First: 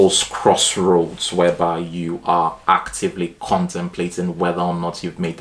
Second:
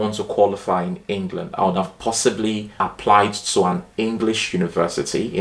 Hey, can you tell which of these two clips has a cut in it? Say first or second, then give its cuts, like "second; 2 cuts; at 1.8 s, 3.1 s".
second; 1 cut; at 2.8 s